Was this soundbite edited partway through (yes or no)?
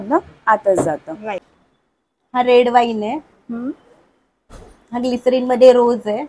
yes